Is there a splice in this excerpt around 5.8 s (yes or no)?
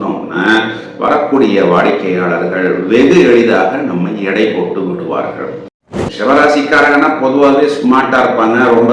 yes